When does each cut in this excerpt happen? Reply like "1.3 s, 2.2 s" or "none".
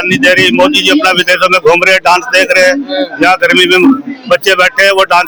none